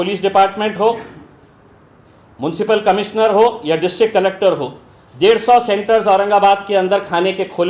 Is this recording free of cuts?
yes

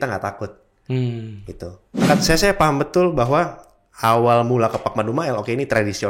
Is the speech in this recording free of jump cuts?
no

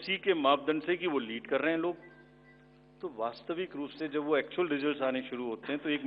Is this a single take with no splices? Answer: yes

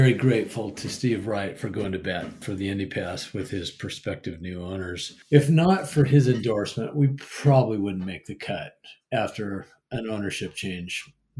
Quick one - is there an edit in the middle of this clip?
yes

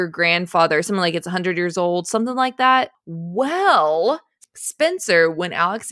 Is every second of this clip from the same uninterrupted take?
no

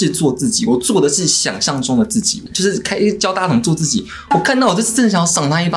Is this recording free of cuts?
no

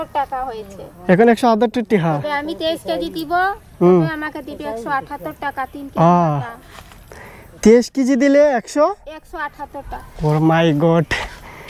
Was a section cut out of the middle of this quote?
no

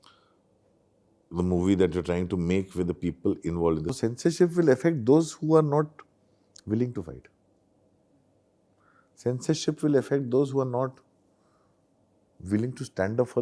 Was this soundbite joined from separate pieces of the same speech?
yes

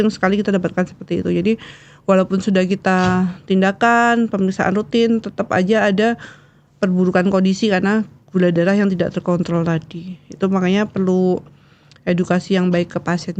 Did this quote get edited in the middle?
no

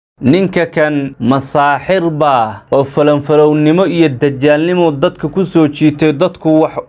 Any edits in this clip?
yes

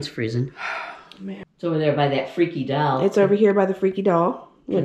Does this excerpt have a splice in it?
yes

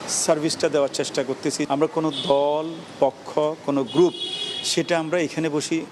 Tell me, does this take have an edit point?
yes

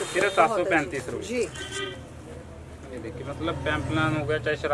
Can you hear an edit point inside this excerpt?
no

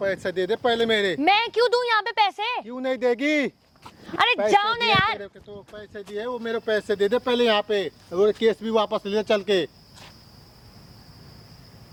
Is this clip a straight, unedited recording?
yes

